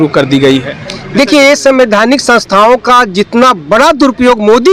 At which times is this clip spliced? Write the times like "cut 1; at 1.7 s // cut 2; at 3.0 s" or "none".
none